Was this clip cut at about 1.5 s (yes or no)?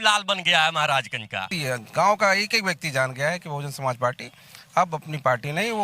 yes